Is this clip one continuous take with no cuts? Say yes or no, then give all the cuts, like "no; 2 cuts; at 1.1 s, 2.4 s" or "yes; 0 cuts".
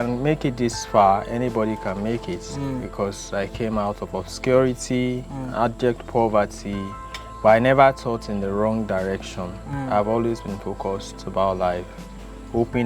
yes; 0 cuts